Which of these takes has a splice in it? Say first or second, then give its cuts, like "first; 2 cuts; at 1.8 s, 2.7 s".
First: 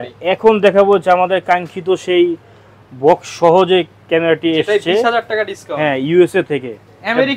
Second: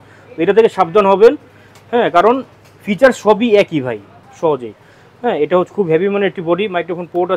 second; 1 cut; at 4.2 s